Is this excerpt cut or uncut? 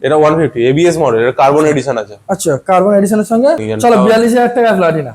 cut